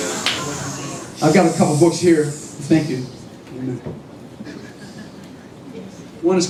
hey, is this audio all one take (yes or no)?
yes